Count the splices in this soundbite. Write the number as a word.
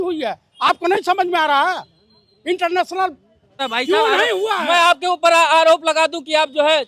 one